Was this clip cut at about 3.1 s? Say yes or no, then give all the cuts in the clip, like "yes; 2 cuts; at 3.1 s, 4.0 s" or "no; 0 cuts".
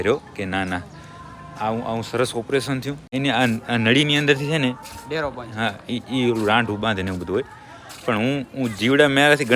yes; 1 cut; at 3.1 s